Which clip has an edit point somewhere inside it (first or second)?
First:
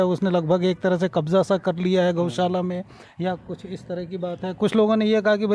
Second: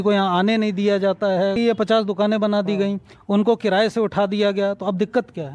second